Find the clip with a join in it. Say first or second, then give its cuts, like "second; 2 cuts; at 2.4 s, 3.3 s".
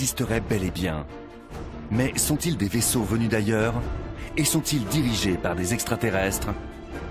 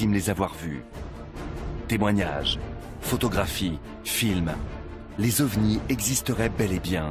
first; 1 cut; at 5.6 s